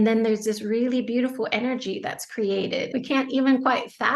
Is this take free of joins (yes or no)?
no